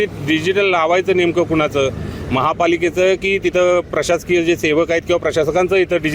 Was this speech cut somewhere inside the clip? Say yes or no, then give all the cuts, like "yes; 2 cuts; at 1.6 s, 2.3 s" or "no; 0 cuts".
no; 0 cuts